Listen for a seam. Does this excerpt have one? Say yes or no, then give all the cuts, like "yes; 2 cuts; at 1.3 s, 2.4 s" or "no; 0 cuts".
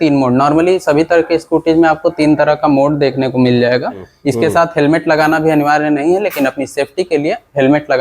yes; 1 cut; at 4.1 s